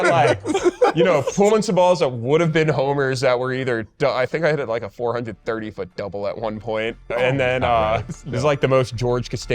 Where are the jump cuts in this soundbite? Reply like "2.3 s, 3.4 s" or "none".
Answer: 8.1 s